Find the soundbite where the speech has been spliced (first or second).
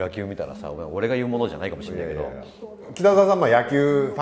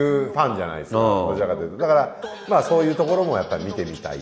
first